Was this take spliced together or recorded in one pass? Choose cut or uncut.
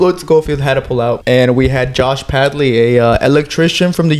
cut